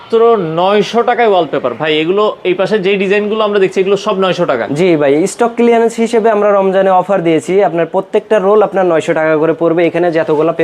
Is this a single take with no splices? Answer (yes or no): yes